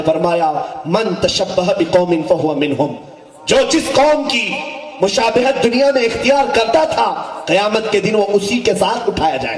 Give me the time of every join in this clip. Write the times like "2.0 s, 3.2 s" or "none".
none

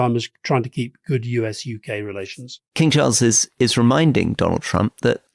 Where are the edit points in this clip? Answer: 2.6 s

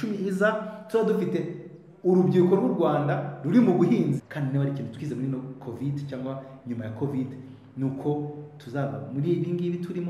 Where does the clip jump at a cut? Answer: 4.2 s

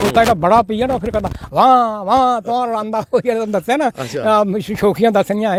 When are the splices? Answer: none

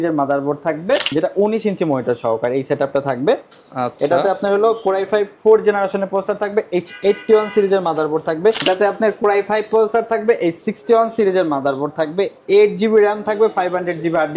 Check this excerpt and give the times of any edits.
1.1 s, 8.6 s

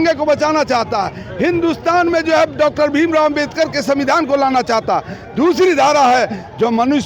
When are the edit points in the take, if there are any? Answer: none

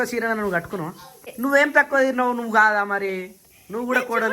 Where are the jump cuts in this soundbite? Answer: 1.3 s

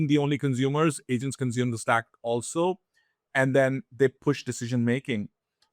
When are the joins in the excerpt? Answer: 1.0 s

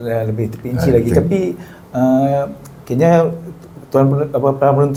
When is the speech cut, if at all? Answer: none

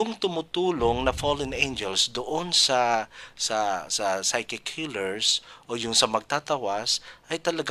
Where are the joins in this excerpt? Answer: none

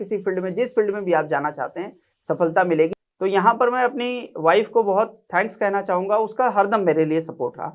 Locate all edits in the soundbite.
2.9 s

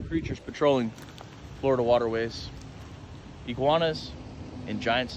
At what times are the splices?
none

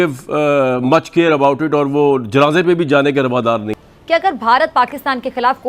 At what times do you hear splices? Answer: 3.8 s

